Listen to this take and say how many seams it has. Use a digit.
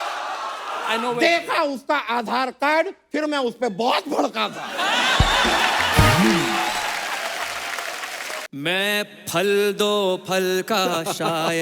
1